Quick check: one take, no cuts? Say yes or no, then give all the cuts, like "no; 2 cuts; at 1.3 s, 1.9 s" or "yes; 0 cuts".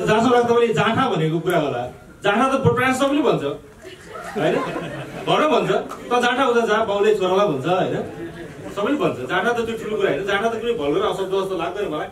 yes; 0 cuts